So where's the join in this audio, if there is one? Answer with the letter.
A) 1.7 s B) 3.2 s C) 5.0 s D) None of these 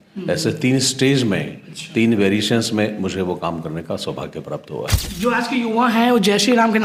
C